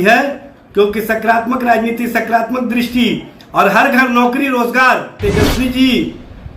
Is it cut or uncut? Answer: cut